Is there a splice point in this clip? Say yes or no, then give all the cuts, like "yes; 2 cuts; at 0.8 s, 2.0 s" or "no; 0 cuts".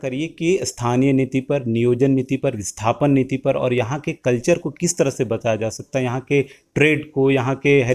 no; 0 cuts